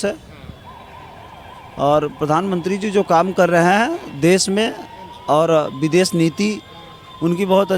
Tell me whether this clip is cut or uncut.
uncut